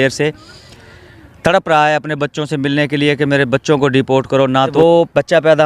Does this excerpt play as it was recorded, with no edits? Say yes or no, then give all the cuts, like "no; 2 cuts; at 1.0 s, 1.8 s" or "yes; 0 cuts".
no; 1 cut; at 4.7 s